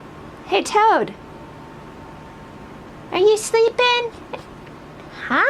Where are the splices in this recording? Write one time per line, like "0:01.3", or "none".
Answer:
none